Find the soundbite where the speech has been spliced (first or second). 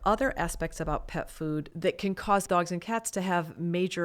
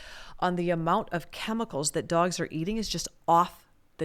first